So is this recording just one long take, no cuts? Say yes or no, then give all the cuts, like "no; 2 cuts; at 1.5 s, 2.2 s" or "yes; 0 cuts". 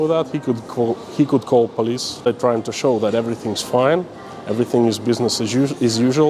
no; 1 cut; at 2.3 s